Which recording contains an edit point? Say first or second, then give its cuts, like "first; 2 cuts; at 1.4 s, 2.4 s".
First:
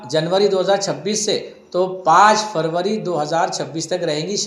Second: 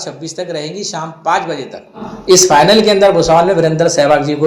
second; 1 cut; at 2.1 s